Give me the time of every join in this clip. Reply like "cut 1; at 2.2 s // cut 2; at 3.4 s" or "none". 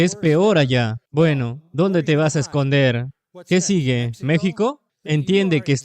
cut 1; at 1.0 s // cut 2; at 4.9 s